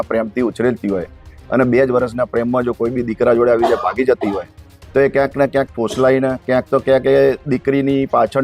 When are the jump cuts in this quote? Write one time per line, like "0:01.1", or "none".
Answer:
none